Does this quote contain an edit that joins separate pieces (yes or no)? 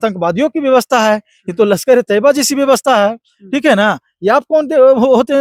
no